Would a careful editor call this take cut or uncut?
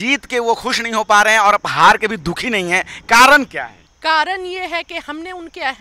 cut